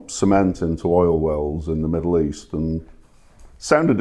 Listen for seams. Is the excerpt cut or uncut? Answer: uncut